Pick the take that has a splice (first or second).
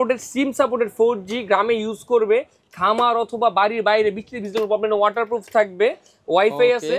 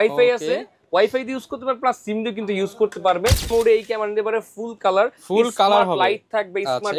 second